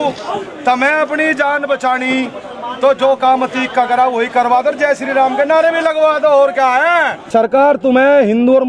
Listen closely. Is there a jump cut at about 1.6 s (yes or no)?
no